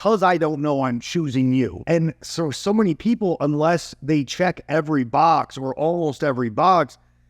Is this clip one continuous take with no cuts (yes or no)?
no